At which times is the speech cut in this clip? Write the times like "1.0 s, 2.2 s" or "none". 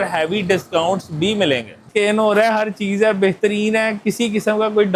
1.8 s